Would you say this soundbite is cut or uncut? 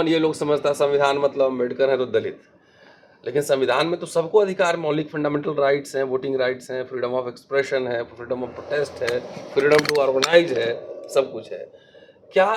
uncut